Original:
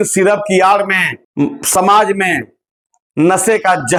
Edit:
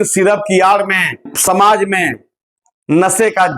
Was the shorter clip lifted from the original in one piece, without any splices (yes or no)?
no